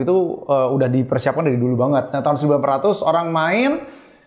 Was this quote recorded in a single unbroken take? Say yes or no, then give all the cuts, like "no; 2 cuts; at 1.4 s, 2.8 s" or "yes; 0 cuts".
yes; 0 cuts